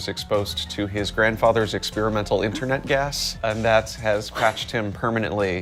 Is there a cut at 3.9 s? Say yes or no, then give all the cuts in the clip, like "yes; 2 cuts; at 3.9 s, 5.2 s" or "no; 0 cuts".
no; 0 cuts